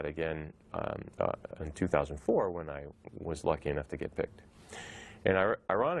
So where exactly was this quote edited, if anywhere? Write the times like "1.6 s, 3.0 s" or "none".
none